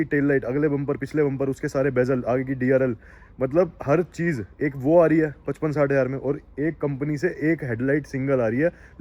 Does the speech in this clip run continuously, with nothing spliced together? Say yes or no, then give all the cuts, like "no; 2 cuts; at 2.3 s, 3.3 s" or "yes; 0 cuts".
yes; 0 cuts